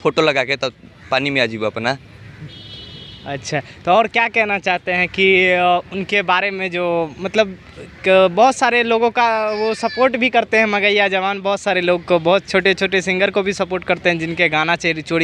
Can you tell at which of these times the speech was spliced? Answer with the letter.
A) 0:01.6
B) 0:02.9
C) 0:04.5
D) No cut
D